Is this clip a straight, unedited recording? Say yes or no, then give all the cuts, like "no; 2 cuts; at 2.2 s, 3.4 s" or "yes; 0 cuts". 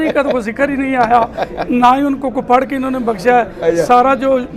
yes; 0 cuts